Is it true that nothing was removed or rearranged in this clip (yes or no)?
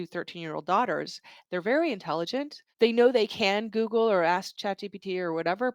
no